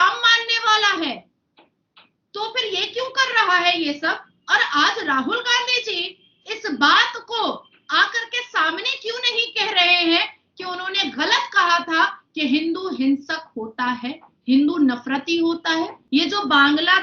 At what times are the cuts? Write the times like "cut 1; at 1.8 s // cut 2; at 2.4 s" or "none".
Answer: cut 1; at 16.0 s